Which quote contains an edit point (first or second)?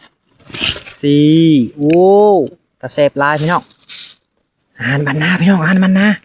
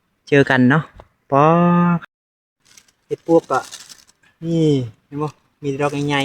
second